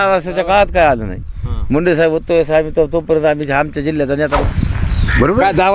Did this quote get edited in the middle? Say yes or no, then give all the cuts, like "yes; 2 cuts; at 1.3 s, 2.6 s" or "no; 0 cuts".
yes; 1 cut; at 4.4 s